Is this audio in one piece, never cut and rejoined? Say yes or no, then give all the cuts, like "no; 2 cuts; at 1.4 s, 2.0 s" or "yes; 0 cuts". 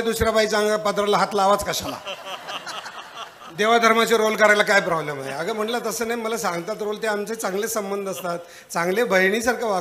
yes; 0 cuts